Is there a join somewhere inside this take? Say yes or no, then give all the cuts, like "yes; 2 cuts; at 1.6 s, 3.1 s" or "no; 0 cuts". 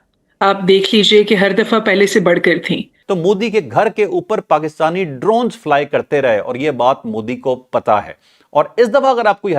yes; 1 cut; at 2.9 s